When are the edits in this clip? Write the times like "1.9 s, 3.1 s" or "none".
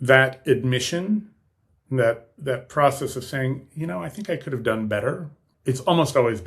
5.4 s